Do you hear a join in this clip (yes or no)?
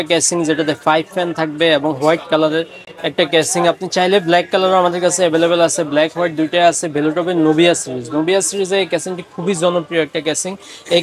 no